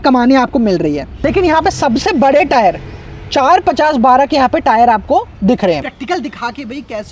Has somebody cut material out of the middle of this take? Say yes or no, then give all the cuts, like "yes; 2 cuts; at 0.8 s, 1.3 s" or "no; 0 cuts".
yes; 2 cuts; at 1.1 s, 5.9 s